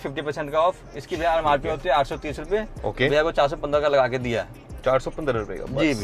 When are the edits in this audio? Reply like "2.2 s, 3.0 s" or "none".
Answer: none